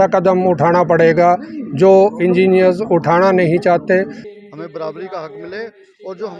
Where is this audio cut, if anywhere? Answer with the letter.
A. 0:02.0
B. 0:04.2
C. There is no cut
B